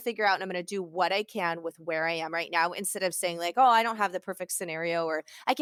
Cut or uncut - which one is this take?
uncut